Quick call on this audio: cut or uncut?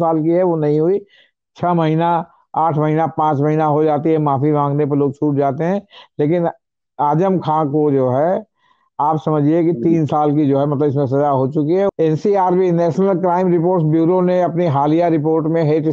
cut